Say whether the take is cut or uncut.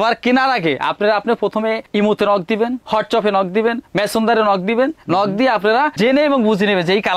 uncut